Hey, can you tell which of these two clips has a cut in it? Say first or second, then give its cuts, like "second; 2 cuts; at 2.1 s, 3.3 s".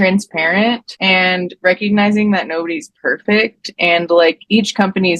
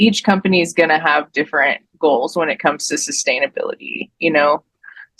first; 1 cut; at 0.9 s